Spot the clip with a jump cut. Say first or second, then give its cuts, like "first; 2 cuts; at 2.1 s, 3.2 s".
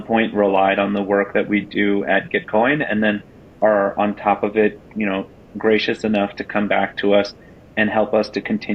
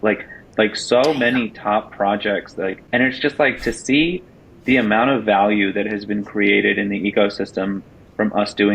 second; 1 cut; at 2.8 s